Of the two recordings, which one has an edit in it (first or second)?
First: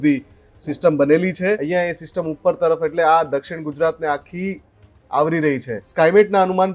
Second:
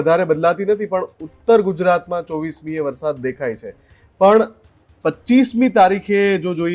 first